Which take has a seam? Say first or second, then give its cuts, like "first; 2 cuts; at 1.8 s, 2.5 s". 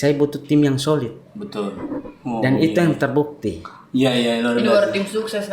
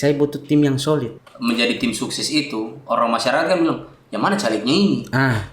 second; 1 cut; at 1.2 s